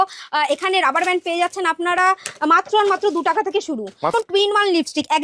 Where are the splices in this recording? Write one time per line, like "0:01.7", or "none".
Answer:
0:04.0